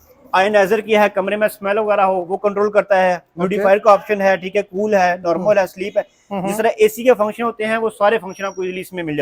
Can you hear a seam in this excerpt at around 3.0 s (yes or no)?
no